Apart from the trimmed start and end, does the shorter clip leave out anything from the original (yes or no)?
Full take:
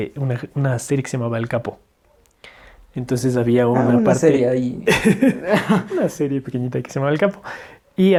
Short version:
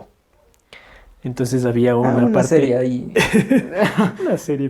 no